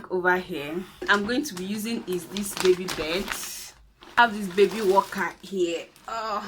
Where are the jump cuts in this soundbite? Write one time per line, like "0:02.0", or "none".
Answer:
0:01.1
0:04.2